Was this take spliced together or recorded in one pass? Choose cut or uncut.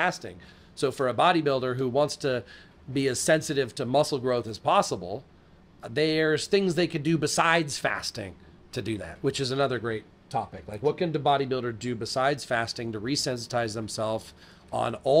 uncut